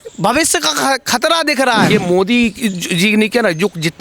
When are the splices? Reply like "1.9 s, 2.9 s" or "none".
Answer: 1.9 s

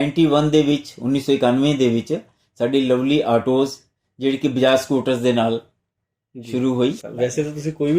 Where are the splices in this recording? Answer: 7.0 s

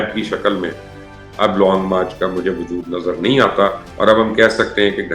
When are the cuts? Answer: 1.1 s, 3.8 s

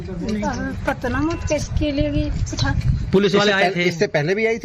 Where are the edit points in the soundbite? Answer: none

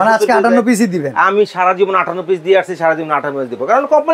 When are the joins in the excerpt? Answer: none

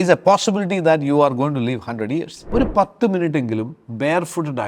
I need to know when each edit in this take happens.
2.4 s

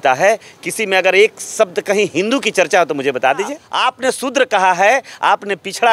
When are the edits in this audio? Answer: 3.7 s

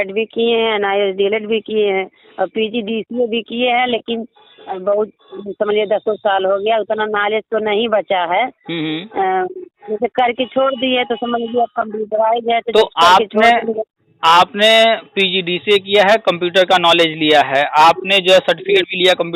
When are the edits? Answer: none

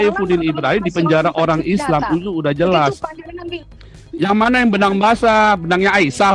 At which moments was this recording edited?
3.4 s

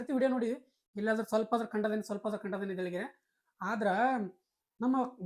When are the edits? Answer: none

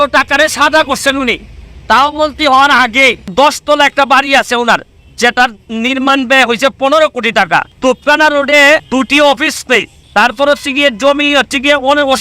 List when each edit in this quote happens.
3.3 s, 7.7 s, 8.8 s, 10.0 s

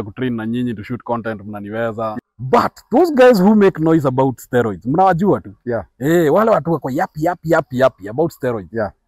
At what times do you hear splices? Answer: 2.1 s

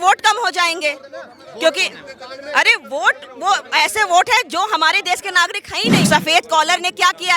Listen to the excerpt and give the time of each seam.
6.1 s

